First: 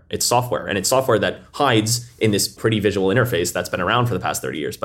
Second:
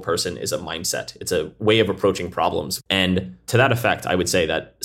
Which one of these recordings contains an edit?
first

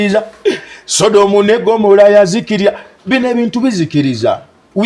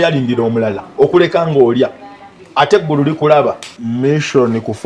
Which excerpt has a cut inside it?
second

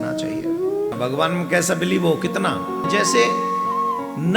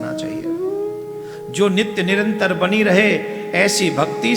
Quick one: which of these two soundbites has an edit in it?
first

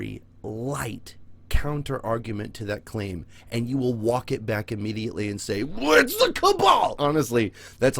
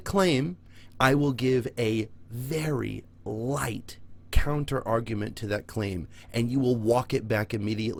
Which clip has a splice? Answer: first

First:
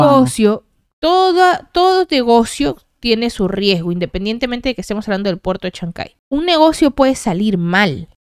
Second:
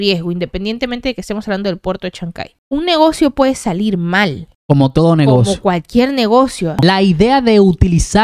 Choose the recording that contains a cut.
second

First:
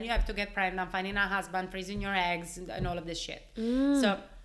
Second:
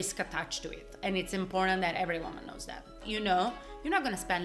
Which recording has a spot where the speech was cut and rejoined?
second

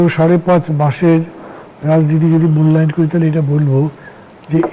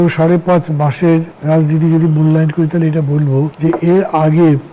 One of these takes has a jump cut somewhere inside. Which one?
second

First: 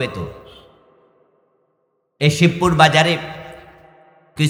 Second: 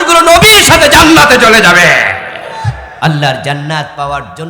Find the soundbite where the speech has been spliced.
second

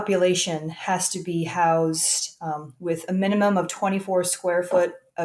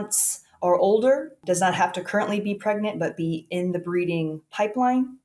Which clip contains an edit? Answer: second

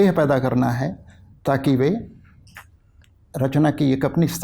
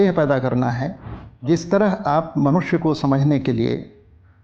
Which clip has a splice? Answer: second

